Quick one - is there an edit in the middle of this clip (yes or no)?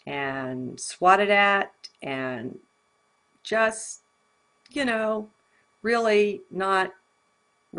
no